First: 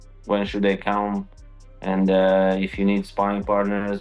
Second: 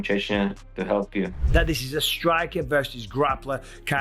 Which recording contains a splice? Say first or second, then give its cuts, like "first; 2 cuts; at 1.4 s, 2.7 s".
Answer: second; 1 cut; at 1.4 s